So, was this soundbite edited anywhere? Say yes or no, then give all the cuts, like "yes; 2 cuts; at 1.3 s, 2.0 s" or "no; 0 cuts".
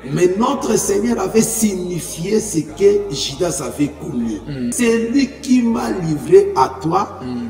yes; 1 cut; at 4.7 s